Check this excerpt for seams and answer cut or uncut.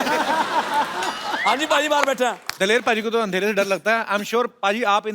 cut